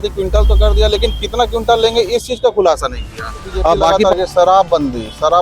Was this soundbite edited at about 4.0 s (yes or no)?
yes